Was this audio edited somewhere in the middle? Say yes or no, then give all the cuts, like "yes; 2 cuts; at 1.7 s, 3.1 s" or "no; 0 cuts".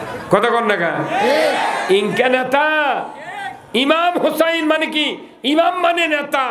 no; 0 cuts